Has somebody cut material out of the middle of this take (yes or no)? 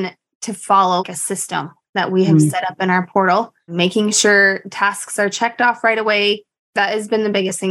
yes